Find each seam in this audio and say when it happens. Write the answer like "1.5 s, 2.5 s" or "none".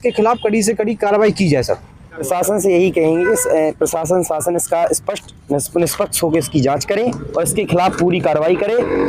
2.2 s